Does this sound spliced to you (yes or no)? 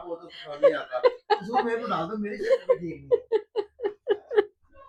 no